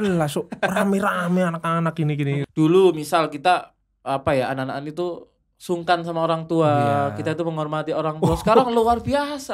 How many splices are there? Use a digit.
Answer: 1